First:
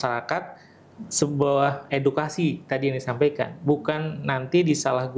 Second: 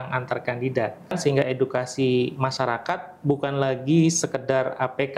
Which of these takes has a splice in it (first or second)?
second